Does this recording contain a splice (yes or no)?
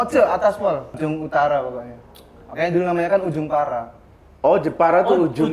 yes